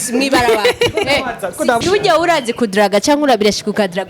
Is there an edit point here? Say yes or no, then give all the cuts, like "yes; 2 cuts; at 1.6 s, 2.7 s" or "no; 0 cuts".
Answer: yes; 1 cut; at 1.8 s